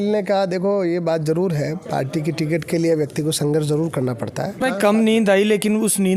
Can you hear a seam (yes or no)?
yes